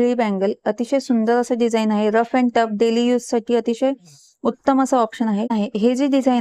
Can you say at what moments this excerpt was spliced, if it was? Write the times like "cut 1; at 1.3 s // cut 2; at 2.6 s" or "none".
cut 1; at 5.5 s

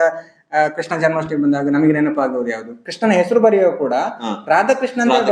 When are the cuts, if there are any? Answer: cut 1; at 2.8 s

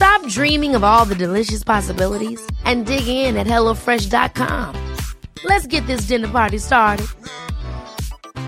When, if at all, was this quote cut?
none

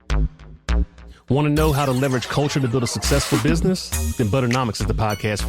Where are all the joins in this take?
cut 1; at 1.2 s

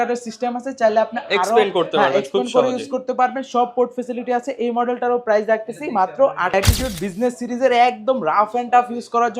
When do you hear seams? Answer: cut 1; at 6.5 s

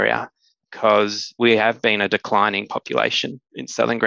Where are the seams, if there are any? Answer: cut 1; at 1.4 s

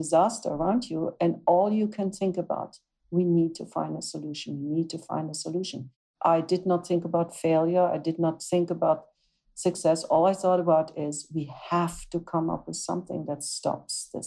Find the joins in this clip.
cut 1; at 6.0 s

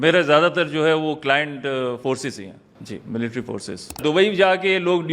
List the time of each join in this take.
cut 1; at 2.7 s // cut 2; at 4.0 s

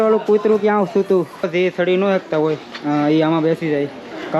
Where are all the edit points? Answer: cut 1; at 1.4 s

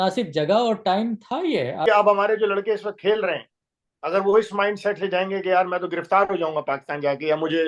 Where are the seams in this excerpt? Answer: cut 1; at 1.9 s

